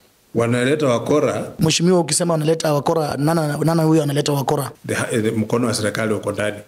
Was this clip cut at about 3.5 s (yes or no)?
no